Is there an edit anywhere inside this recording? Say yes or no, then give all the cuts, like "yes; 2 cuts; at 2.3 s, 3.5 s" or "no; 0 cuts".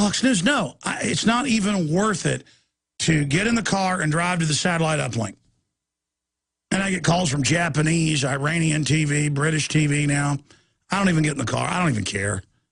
no; 0 cuts